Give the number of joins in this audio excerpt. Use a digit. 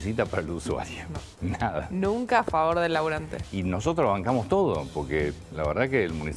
1